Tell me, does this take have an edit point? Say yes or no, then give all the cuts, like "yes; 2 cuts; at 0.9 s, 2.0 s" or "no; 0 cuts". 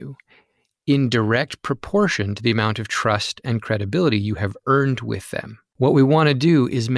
yes; 1 cut; at 5.6 s